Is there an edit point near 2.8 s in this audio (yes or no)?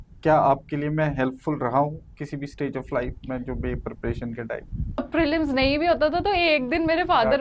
no